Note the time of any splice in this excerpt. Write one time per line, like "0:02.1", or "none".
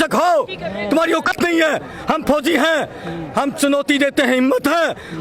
0:01.3

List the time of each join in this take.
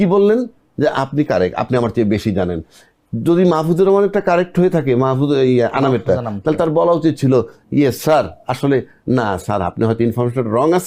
none

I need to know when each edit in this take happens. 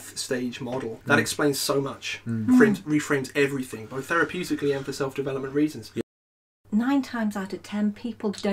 0:00.9
0:06.0

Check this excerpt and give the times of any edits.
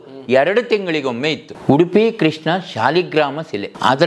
0:01.5

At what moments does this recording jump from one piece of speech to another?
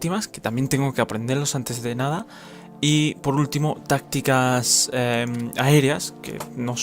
none

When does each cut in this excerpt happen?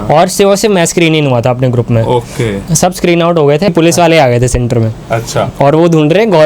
0:03.7

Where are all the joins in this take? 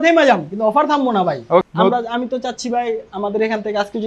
0:01.6

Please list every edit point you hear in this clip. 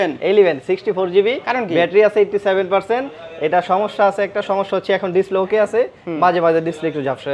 none

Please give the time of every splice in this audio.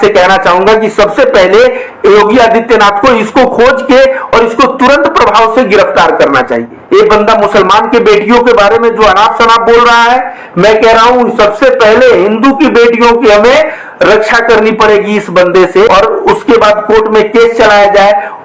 0:06.8
0:15.9

